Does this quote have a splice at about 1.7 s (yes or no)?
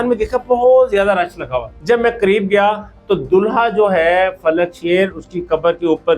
yes